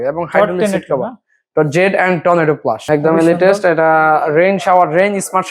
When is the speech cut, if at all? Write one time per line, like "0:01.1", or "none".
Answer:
0:02.8